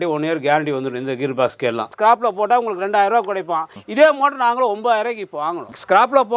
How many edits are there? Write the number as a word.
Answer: one